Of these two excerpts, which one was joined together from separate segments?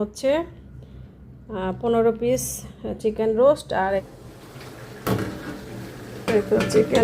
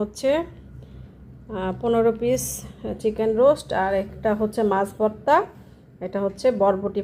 first; 1 cut; at 4.1 s

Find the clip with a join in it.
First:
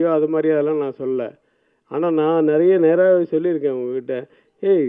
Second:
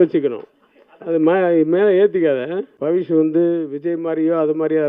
second; 1 cut; at 2.6 s

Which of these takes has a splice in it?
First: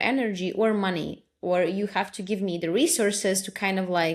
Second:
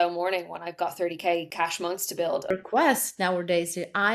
second; 2 cuts; at 1.5 s, 2.4 s

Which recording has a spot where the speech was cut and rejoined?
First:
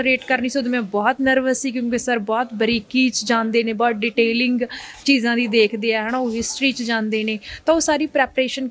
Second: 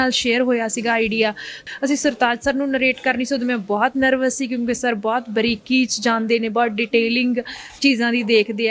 second; 1 cut; at 1.6 s

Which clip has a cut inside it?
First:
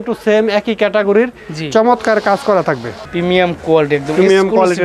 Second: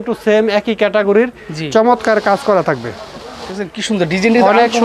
first; 1 cut; at 3.0 s

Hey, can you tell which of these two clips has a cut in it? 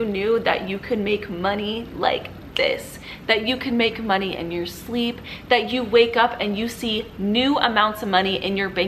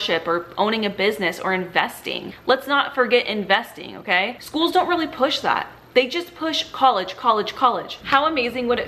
second; 2 cuts; at 2.2 s, 8.0 s

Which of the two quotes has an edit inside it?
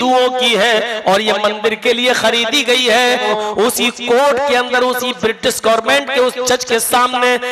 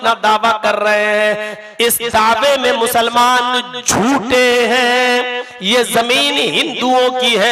first; 1 cut; at 3.3 s

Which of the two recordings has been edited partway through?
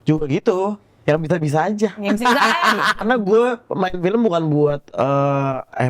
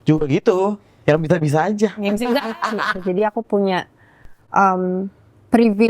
second; 1 cut; at 3.0 s

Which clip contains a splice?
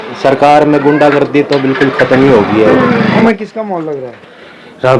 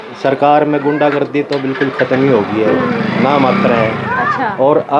first; 1 cut; at 3.2 s

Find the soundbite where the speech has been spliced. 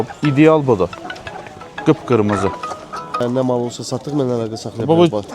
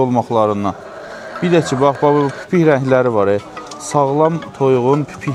first; 1 cut; at 3.2 s

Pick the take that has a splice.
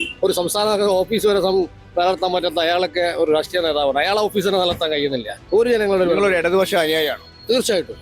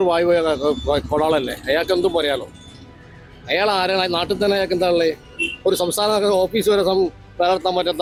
first; 1 cut; at 5.3 s

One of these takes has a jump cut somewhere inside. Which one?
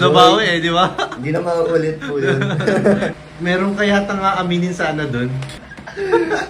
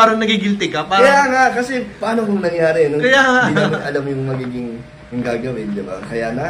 first; 2 cuts; at 3.1 s, 5.4 s

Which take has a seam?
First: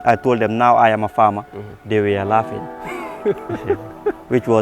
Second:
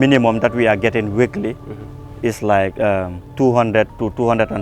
second; 1 cut; at 3.2 s

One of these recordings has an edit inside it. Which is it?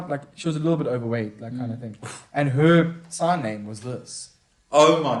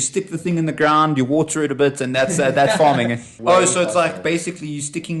second; 1 cut; at 3.3 s

